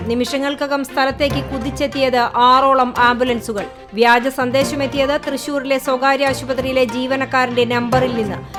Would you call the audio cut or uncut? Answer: uncut